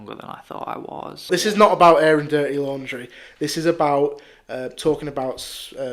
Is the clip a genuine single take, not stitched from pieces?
no; 1 cut; at 1.3 s

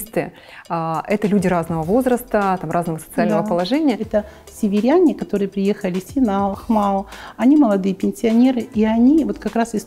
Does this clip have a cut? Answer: yes; 1 cut; at 4.0 s

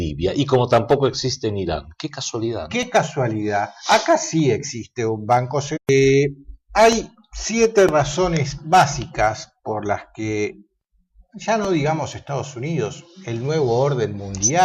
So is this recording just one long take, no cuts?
yes; 0 cuts

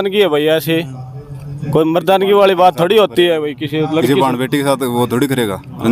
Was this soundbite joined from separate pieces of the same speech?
no; 0 cuts

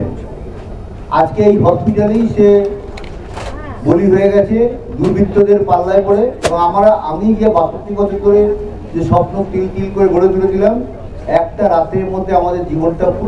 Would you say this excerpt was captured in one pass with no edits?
no; 1 cut; at 6.4 s

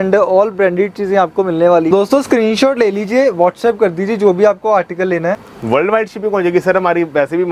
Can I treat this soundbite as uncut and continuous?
no; 2 cuts; at 1.9 s, 5.5 s

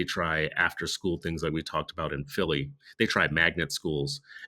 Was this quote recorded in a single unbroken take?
yes; 0 cuts

